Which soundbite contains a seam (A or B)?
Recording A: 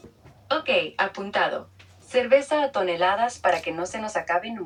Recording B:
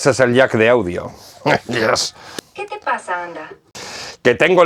B